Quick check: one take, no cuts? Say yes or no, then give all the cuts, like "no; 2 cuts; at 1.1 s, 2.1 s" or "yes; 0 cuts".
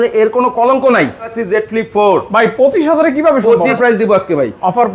no; 2 cuts; at 1.4 s, 3.7 s